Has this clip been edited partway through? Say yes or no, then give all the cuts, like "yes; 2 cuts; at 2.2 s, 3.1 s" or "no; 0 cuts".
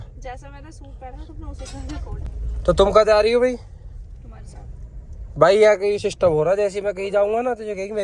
no; 0 cuts